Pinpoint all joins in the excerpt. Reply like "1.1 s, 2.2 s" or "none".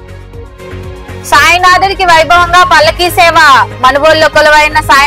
1.2 s